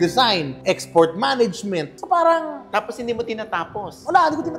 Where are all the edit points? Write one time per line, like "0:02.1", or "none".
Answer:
none